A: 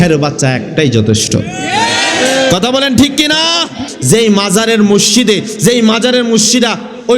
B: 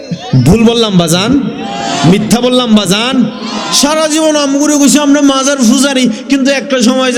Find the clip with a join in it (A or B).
A